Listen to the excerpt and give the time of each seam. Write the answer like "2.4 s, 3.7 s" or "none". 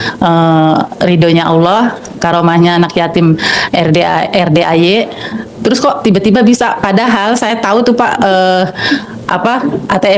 none